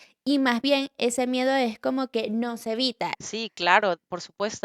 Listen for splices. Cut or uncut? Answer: cut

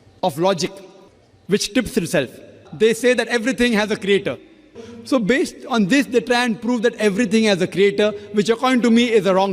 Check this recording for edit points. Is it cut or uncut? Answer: cut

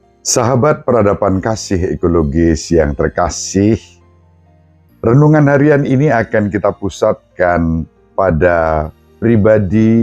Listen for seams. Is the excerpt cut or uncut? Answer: uncut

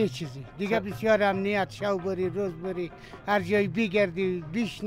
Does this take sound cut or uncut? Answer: uncut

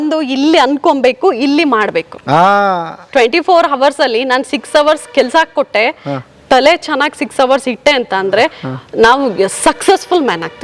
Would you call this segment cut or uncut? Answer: uncut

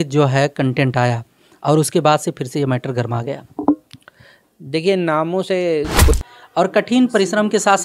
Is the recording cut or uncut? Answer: cut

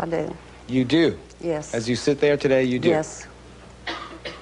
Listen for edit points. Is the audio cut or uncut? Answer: uncut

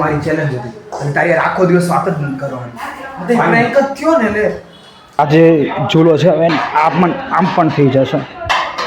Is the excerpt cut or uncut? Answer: cut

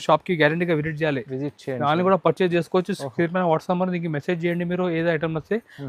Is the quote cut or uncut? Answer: uncut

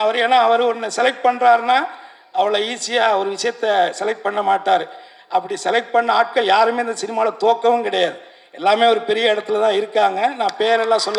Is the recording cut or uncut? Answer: uncut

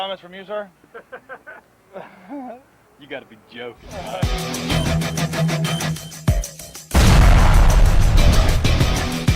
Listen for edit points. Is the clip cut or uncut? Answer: cut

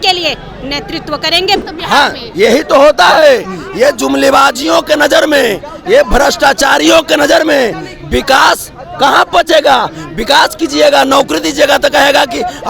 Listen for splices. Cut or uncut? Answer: cut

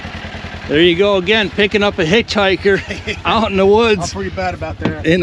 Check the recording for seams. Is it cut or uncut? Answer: uncut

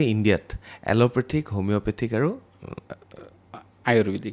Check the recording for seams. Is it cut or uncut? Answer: uncut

